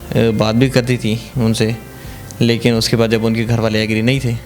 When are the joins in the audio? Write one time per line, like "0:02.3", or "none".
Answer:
none